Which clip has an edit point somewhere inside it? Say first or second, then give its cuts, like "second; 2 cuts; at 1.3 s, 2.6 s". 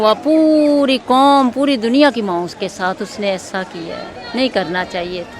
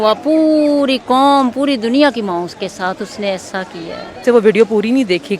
second; 1 cut; at 4.2 s